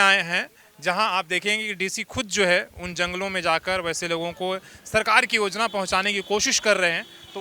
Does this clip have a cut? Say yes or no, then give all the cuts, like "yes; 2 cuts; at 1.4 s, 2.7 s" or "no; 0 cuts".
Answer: no; 0 cuts